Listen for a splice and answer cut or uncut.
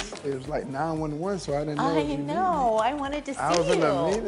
uncut